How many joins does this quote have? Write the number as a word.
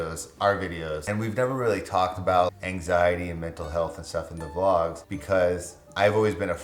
one